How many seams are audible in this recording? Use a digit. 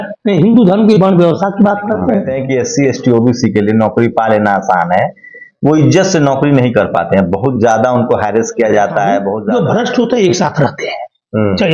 2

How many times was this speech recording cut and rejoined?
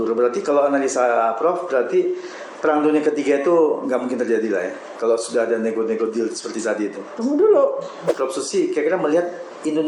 1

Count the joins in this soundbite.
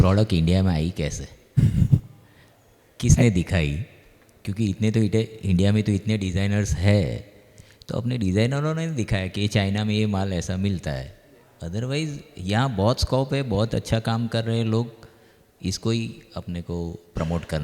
0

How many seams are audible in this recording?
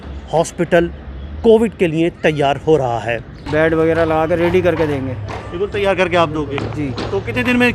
1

